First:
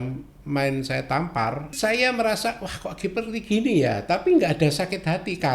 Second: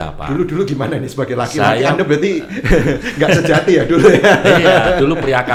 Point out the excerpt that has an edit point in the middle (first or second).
first